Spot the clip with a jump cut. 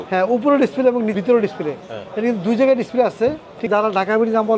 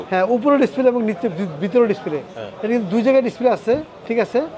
first; 2 cuts; at 1.2 s, 3.7 s

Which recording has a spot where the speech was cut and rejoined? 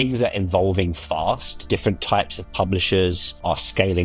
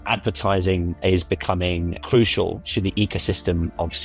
second; 1 cut; at 2.0 s

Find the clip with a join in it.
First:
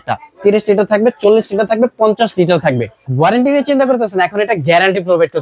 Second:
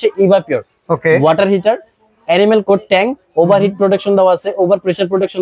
first; 1 cut; at 3.0 s

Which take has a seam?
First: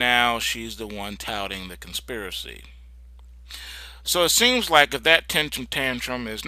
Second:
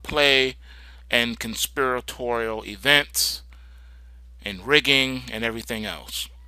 second; 1 cut; at 2.8 s

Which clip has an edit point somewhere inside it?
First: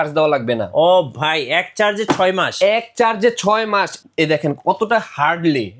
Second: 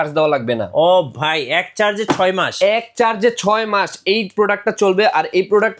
first; 1 cut; at 4.0 s

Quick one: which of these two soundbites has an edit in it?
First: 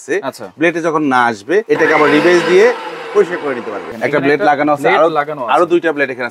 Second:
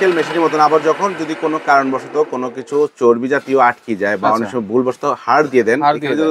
first; 2 cuts; at 1.6 s, 3.9 s

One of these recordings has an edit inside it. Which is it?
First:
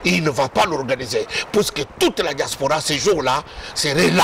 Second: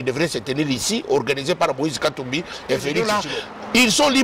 second; 1 cut; at 3.2 s

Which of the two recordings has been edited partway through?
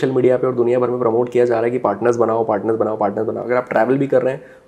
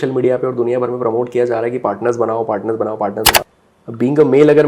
second; 1 cut; at 3.4 s

